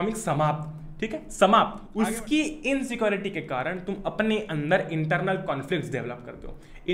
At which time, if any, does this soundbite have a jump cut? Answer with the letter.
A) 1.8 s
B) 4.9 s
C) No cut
A